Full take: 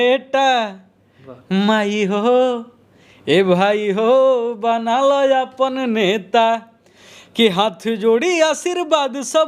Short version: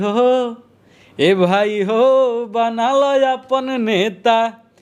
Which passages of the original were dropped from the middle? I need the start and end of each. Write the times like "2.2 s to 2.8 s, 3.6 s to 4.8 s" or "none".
none